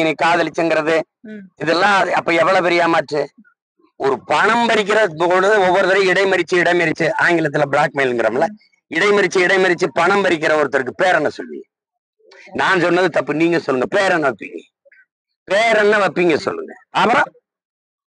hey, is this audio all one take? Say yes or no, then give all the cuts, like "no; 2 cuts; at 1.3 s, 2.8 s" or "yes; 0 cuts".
yes; 0 cuts